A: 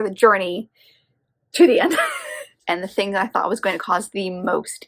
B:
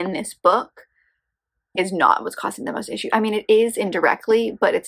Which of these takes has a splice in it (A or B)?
A